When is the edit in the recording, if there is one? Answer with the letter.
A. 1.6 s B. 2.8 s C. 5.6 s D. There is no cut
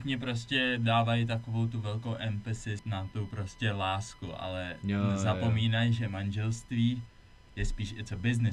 B